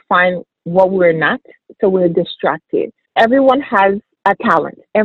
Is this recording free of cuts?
no; 1 cut; at 4.1 s

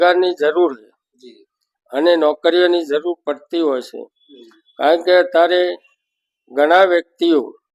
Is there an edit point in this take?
no; 0 cuts

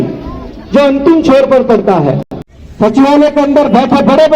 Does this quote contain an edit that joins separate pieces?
yes; 1 cut; at 2.6 s

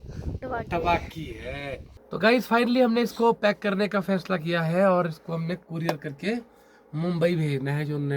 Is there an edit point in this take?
yes; 1 cut; at 1.9 s

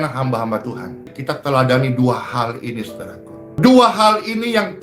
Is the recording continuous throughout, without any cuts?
no; 1 cut; at 1.1 s

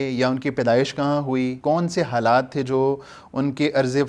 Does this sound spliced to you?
yes; 1 cut; at 1.6 s

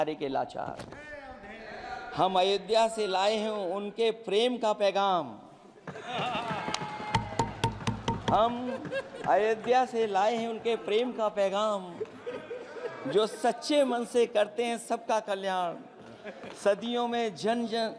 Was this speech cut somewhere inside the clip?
no; 0 cuts

